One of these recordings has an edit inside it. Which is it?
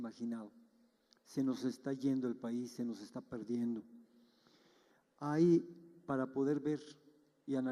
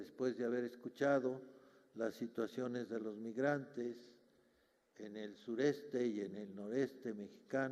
second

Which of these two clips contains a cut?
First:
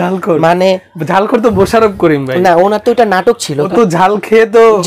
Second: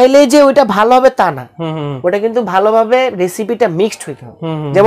first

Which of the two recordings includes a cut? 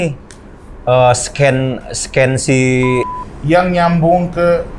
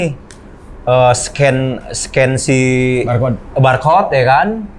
first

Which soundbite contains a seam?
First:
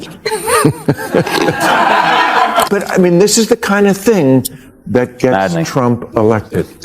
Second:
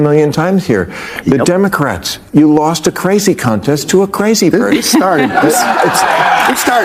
first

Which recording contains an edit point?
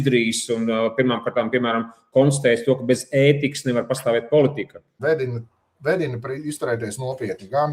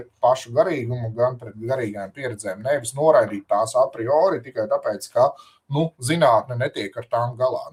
first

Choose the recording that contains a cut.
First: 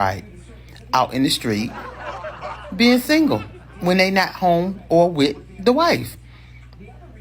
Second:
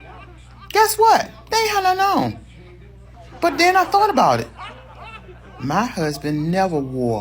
first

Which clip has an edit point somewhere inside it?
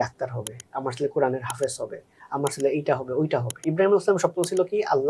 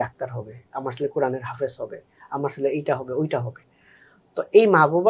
first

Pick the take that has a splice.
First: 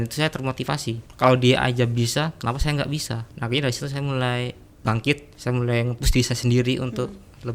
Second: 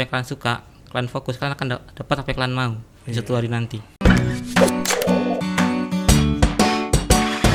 first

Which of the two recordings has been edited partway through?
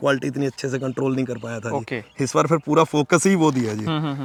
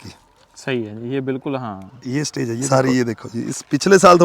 second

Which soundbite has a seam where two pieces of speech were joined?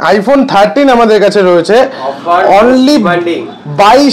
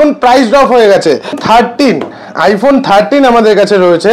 second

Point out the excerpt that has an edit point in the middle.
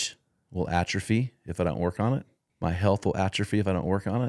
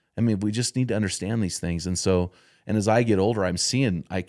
first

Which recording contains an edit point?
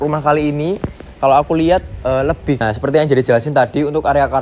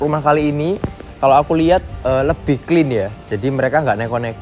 first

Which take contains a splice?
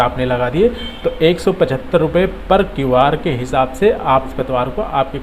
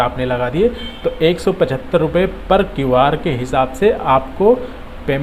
first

